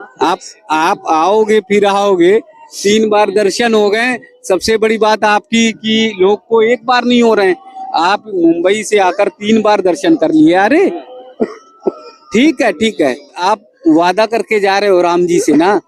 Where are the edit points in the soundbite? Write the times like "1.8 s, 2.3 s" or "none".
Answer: 13.4 s